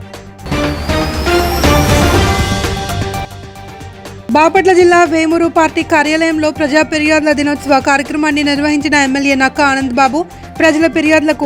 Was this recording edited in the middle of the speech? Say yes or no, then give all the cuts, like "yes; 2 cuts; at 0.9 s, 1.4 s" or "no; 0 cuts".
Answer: no; 0 cuts